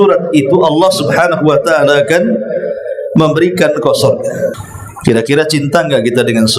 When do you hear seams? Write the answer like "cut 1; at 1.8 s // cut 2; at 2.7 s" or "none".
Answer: cut 1; at 4.6 s